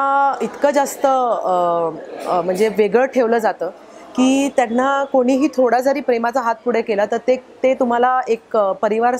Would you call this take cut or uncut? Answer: uncut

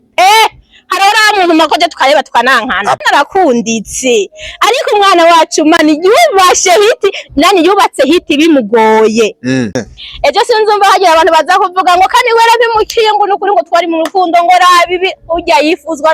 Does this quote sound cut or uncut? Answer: cut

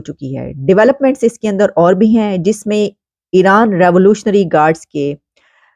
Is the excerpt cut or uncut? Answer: uncut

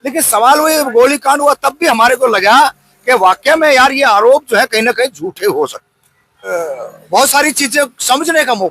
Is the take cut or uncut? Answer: cut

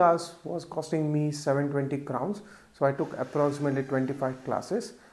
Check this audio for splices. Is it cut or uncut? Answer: uncut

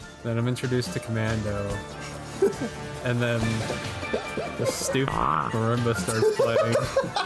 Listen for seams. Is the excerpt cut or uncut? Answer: uncut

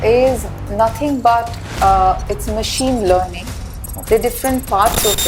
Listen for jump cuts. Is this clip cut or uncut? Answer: uncut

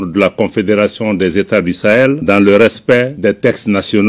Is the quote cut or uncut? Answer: cut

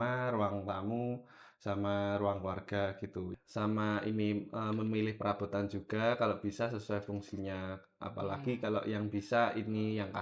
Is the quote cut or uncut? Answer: cut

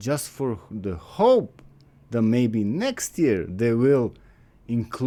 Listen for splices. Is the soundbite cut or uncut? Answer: uncut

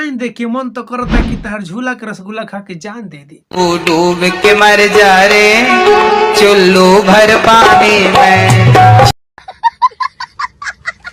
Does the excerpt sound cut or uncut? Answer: uncut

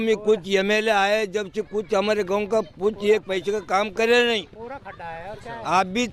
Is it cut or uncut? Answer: uncut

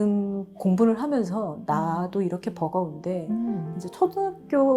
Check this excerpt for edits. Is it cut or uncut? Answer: uncut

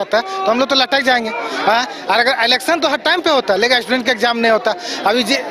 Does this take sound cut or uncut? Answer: uncut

